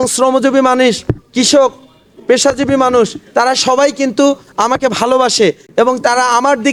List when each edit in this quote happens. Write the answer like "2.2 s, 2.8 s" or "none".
none